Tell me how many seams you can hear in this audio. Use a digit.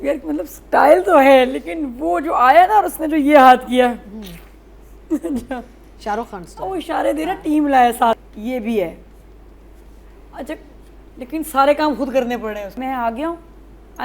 2